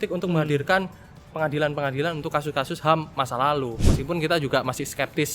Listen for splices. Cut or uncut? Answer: cut